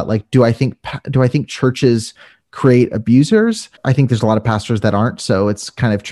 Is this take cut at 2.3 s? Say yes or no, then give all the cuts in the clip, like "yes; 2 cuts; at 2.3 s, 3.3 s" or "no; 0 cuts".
no; 1 cut; at 3.7 s